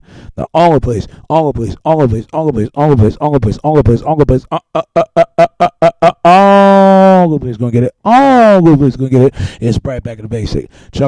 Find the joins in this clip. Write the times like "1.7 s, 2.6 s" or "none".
2.7 s